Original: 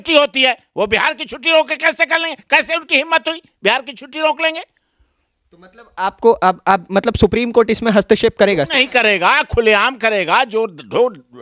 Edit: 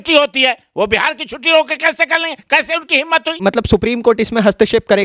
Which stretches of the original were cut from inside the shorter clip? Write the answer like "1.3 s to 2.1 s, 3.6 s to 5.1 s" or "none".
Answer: 3.4 s to 6.9 s